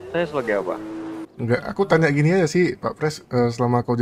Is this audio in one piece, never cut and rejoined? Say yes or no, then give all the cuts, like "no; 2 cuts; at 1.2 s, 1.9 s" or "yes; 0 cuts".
no; 1 cut; at 1.2 s